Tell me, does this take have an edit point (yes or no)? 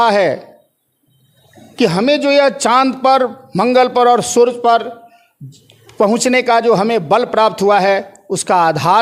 no